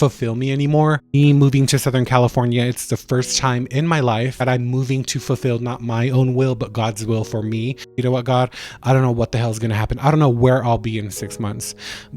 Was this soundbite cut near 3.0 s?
no; 3 cuts; at 1.1 s, 4.4 s, 7.9 s

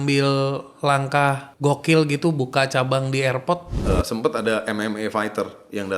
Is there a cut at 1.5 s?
yes; 2 cuts; at 1.5 s, 3.7 s

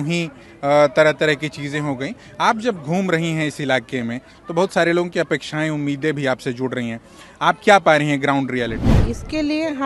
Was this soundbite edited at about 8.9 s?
yes; 1 cut; at 8.9 s

